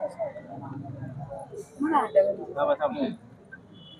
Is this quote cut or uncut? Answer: uncut